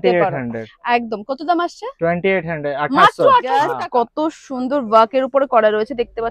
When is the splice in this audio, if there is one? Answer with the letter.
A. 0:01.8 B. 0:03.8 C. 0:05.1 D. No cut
B